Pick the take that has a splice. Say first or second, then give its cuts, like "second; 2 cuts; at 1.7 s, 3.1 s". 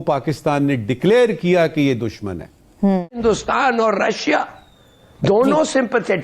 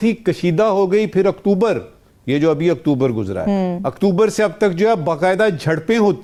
first; 1 cut; at 3.2 s